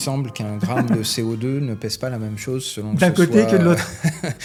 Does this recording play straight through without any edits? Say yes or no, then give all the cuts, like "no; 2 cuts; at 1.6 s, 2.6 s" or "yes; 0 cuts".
yes; 0 cuts